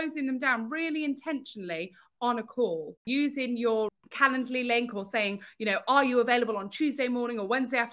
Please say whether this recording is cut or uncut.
cut